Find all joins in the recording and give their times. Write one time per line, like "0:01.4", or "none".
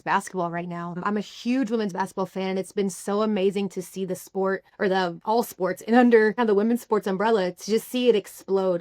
0:01.0
0:04.9
0:06.4